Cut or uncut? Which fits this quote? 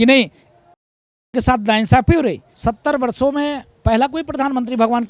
cut